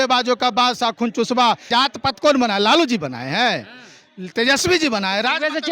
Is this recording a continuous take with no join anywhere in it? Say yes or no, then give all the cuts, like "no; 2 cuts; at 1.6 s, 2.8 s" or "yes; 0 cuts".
no; 1 cut; at 1.7 s